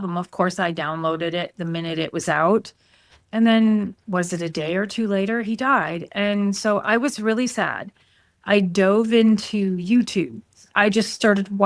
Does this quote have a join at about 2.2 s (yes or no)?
no